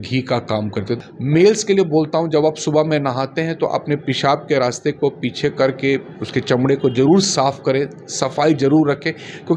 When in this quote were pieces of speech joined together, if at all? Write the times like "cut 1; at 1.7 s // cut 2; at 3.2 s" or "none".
cut 1; at 1.0 s